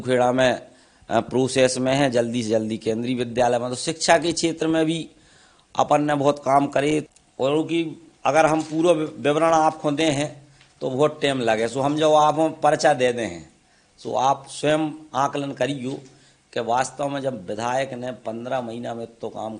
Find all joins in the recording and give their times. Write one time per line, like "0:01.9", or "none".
0:07.2